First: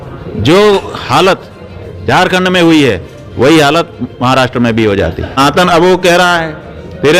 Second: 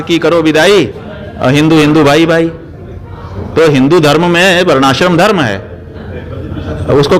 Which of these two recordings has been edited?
first; 1 cut; at 5.4 s

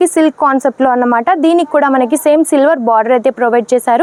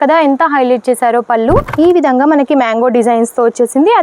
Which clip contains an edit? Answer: second; 1 cut; at 1.7 s

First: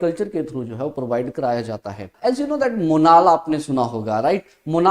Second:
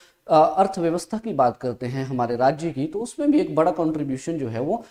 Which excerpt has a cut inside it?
first; 1 cut; at 2.2 s

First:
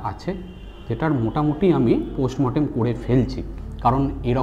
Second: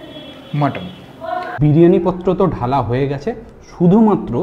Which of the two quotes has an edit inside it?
second; 1 cut; at 1.5 s

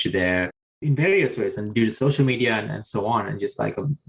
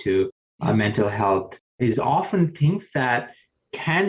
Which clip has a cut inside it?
second; 1 cut; at 1.9 s

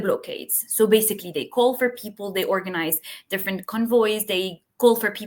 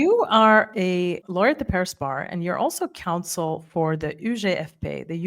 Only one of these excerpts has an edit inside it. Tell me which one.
second; 1 cut; at 1.2 s

